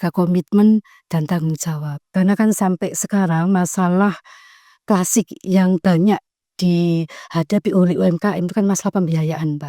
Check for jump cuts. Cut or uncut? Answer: cut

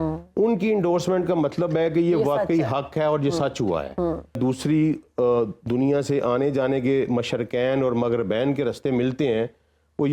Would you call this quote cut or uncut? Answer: cut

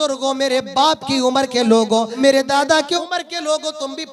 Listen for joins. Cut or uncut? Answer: cut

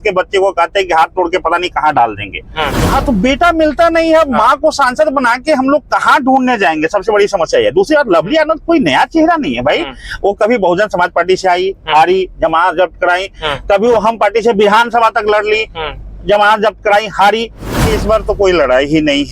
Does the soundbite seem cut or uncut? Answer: cut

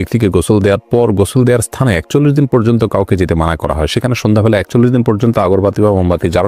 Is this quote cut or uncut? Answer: uncut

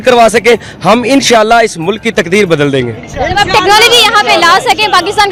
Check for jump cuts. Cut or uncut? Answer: uncut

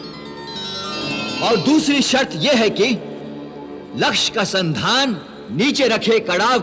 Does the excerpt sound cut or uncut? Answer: cut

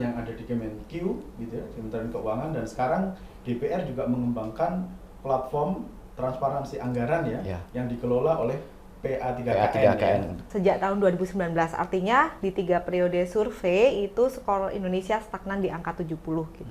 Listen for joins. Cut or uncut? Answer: cut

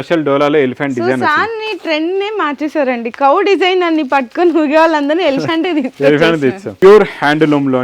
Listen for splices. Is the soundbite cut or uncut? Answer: cut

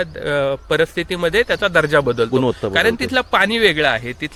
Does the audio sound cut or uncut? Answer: uncut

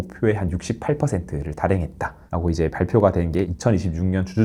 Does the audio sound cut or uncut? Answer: uncut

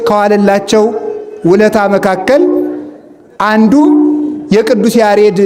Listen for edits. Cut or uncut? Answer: uncut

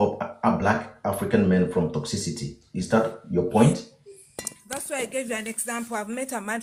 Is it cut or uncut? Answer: uncut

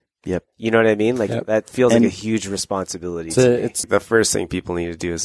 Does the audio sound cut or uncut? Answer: cut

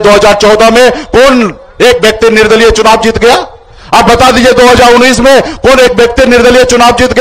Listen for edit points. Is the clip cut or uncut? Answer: uncut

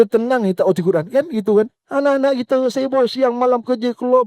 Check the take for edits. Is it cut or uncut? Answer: cut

